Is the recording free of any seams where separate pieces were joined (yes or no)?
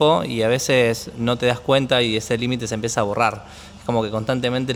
yes